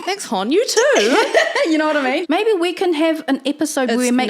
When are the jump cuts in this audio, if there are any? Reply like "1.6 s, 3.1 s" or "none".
2.2 s